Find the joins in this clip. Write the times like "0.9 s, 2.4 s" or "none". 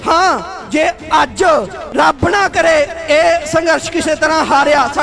1.8 s